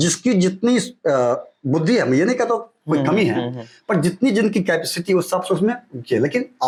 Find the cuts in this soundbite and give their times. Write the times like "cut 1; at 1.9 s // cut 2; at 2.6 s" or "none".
none